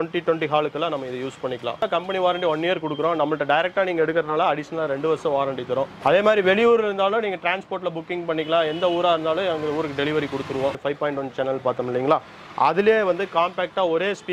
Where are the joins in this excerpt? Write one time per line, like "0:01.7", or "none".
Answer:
0:01.9
0:05.9
0:10.8